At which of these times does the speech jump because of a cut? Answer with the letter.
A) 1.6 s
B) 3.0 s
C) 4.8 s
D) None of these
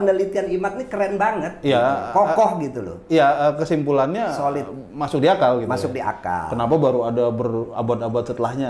D